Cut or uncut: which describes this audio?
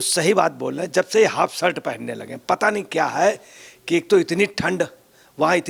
uncut